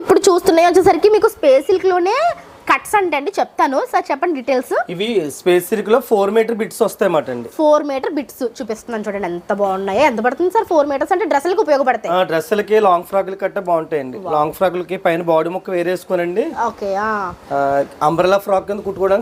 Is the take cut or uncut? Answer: uncut